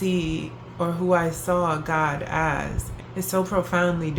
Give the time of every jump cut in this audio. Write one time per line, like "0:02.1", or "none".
0:02.9